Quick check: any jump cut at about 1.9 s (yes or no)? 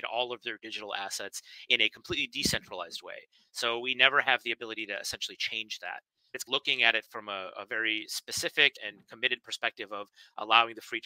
no